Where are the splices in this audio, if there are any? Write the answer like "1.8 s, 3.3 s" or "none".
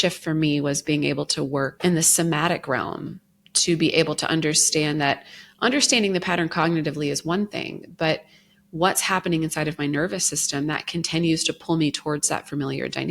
1.7 s